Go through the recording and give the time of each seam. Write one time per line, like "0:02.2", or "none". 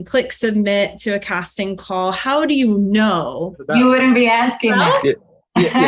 0:03.6

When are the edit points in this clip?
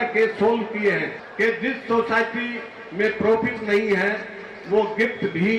0:01.2

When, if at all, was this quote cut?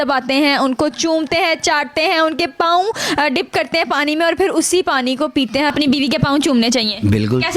0:05.7

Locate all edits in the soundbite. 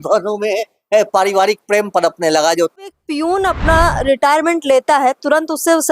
0:02.9

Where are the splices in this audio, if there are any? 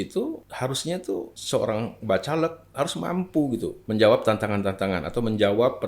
0:00.8
0:03.8

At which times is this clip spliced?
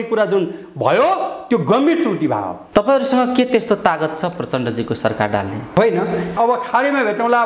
0:02.6
0:06.3

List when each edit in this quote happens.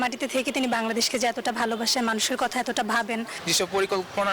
0:03.3

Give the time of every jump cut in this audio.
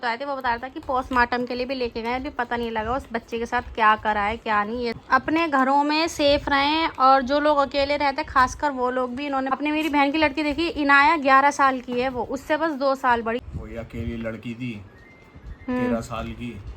0:05.0
0:09.6
0:13.4

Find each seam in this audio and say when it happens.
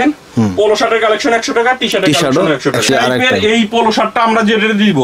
0:02.9

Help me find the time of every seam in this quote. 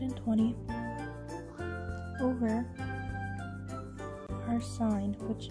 0:02.7
0:04.5

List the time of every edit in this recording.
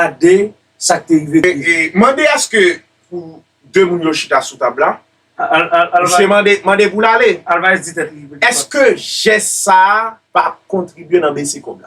0:01.6
0:10.2

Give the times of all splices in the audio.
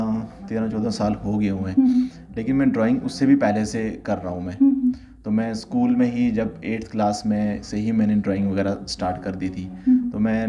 none

